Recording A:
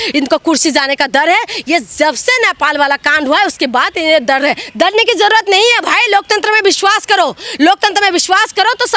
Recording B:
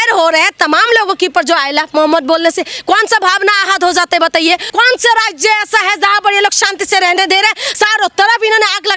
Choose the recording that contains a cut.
B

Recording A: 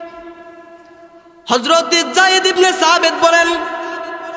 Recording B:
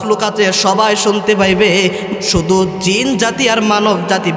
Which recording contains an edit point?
B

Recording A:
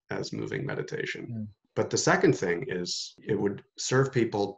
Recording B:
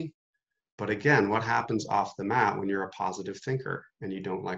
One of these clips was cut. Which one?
A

